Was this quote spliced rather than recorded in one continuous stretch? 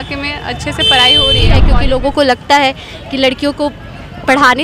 yes; 1 cut; at 1.7 s

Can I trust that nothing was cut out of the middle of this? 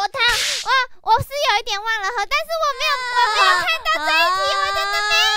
no; 1 cut; at 3.0 s

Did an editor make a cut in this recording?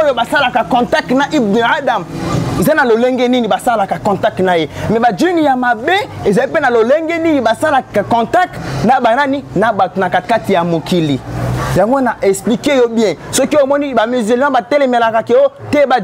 no; 0 cuts

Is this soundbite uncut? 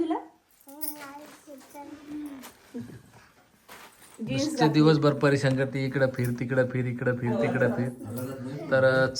yes; 0 cuts

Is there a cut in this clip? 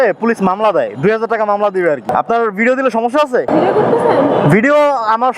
yes; 2 cuts; at 2.1 s, 3.5 s

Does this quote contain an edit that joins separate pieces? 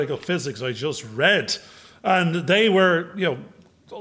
no; 0 cuts

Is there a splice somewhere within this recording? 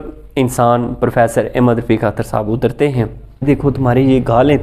yes; 1 cut; at 3.5 s

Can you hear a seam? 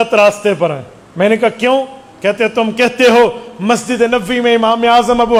no; 0 cuts

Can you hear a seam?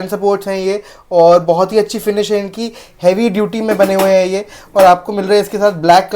no; 0 cuts

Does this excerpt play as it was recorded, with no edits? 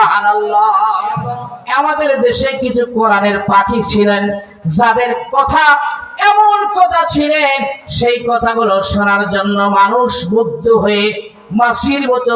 no; 1 cut; at 1.5 s

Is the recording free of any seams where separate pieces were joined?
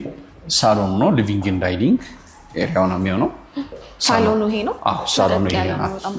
yes; 0 cuts

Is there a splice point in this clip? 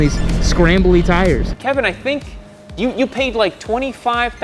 yes; 1 cut; at 1.5 s

